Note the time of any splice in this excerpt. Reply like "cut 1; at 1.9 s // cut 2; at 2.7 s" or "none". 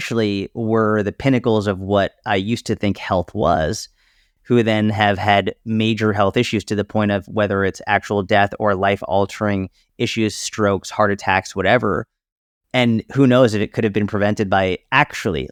none